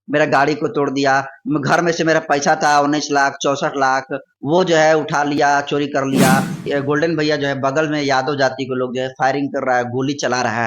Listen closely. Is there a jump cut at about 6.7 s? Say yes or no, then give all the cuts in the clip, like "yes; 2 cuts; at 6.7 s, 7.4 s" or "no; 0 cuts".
yes; 1 cut; at 6.7 s